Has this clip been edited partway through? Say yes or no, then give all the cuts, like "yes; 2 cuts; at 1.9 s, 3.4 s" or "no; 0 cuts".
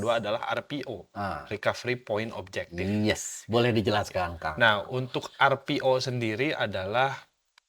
no; 0 cuts